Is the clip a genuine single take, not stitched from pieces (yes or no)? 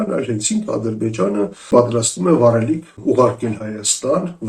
no